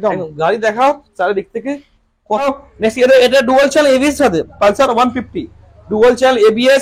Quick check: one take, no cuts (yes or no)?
no